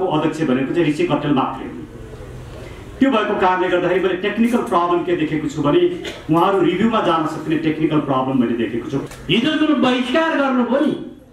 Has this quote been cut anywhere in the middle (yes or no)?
yes